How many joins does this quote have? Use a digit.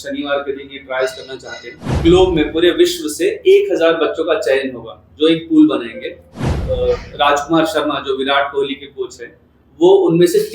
2